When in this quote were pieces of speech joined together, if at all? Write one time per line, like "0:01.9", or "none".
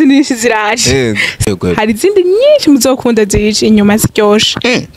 0:01.5

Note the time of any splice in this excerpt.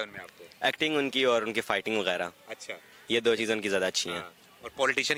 none

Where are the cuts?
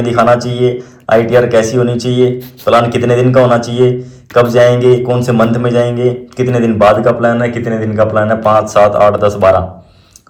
none

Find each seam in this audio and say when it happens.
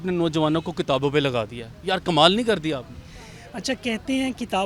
none

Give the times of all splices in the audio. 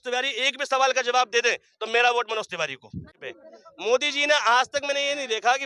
0:03.1

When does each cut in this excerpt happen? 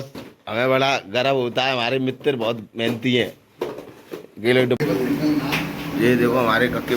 0:04.8

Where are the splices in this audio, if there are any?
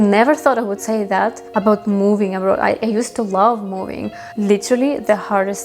0:01.4
0:04.3

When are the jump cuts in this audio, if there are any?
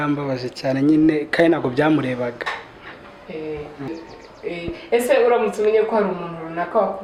none

